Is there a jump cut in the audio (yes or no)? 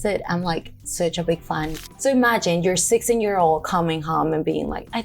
yes